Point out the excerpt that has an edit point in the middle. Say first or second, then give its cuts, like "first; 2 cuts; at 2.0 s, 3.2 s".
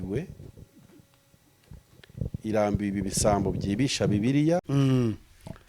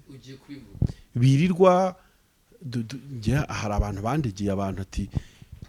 first; 1 cut; at 4.7 s